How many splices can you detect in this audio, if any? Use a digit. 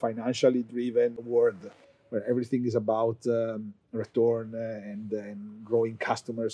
1